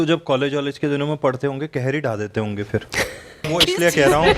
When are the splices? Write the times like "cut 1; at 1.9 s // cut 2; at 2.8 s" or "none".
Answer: cut 1; at 3.5 s

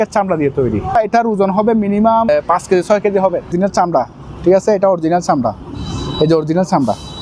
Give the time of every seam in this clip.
cut 1; at 1.0 s // cut 2; at 2.3 s // cut 3; at 3.5 s

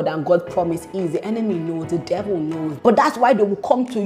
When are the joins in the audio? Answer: cut 1; at 2.8 s

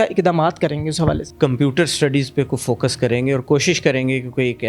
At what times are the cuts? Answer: cut 1; at 1.3 s

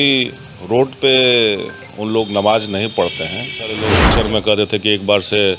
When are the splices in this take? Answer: cut 1; at 4.1 s

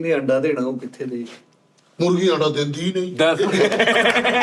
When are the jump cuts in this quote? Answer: none

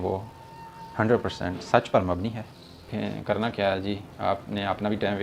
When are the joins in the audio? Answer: cut 1; at 2.9 s

